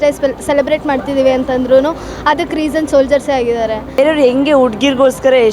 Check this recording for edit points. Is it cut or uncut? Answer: cut